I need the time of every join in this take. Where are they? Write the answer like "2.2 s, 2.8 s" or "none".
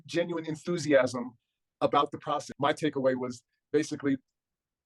2.5 s